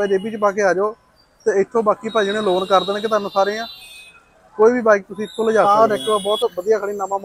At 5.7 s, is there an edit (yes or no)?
yes